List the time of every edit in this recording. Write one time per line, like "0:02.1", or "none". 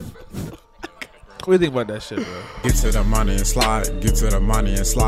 0:02.4